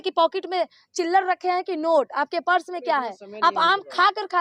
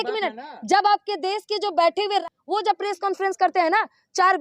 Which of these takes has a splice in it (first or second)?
second